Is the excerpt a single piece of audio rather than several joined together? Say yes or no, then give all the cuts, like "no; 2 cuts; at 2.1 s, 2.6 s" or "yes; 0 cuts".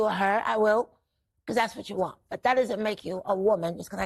yes; 0 cuts